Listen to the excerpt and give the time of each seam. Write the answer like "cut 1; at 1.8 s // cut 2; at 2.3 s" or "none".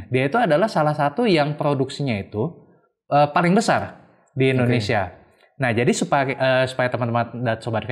none